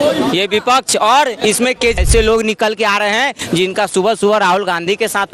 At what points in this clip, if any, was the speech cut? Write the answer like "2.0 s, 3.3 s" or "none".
2.0 s